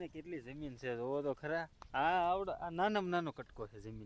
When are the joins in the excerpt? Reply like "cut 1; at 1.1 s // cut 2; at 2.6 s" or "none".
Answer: none